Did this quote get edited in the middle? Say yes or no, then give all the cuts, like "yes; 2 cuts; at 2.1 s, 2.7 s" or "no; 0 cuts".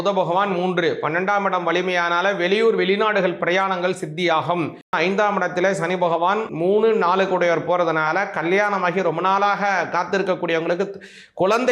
yes; 2 cuts; at 4.9 s, 6.5 s